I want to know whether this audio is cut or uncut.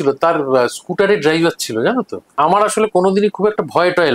cut